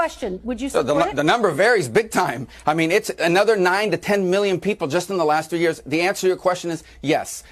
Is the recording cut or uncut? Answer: cut